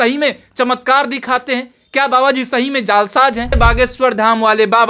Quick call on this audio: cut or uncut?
cut